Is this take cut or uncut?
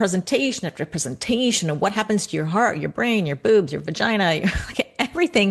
uncut